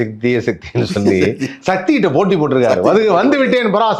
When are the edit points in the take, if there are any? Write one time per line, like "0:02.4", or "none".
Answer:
none